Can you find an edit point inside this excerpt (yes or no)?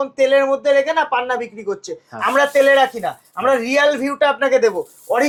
no